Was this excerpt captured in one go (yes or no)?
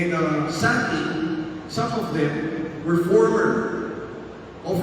no